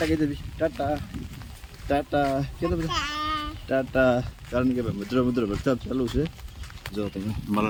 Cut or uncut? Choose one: uncut